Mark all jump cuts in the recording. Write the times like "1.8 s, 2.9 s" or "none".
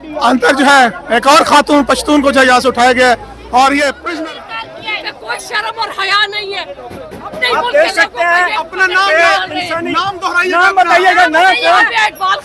4.0 s